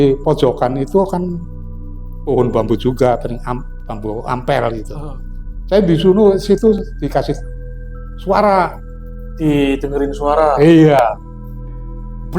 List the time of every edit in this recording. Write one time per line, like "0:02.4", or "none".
none